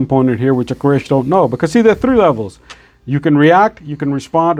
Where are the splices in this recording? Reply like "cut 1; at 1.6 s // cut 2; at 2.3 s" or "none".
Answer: none